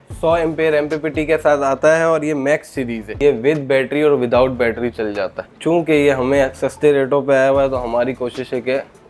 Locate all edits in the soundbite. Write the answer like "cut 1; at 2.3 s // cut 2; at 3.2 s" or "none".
cut 1; at 3.2 s // cut 2; at 5.5 s